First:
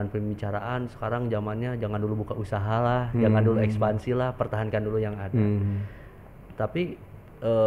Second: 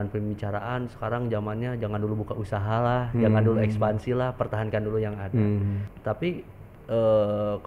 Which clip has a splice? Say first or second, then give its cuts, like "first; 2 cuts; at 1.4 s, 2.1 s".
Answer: second; 1 cut; at 5.9 s